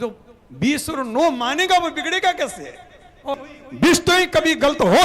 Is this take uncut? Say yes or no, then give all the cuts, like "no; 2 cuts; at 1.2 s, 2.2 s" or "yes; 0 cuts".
no; 1 cut; at 3.3 s